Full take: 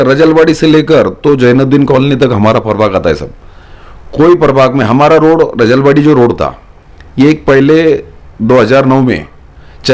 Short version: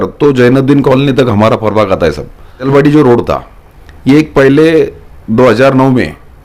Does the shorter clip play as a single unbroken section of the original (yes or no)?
no